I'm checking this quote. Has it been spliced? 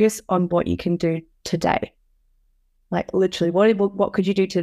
no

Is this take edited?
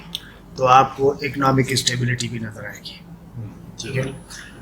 no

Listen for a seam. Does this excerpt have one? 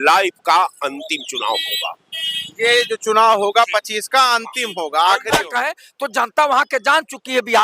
yes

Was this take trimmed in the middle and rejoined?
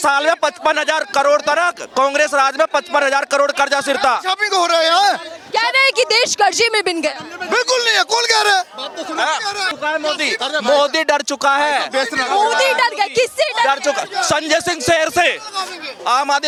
no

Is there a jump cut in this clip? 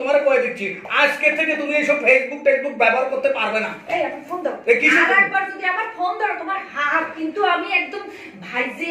no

